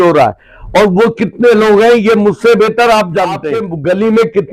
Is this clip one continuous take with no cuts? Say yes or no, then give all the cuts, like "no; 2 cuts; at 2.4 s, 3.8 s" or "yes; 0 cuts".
yes; 0 cuts